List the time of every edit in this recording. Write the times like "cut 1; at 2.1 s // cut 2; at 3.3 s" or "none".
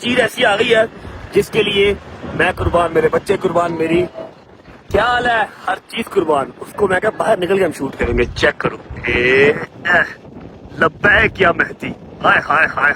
none

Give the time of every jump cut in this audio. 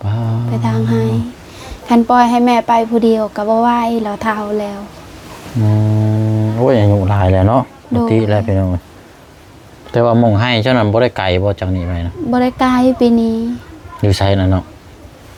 none

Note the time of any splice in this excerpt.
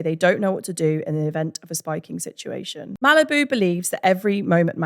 cut 1; at 2.9 s

